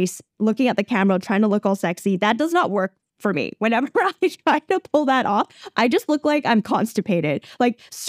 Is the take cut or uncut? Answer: uncut